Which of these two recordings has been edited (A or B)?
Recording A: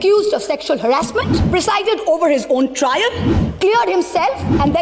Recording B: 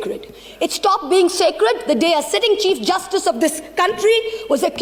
A